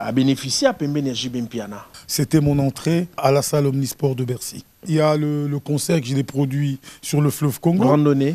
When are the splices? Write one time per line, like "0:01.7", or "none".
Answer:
0:01.9
0:03.2
0:04.9